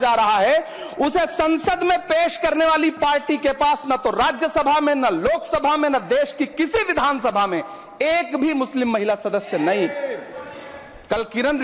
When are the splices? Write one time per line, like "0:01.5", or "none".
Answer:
none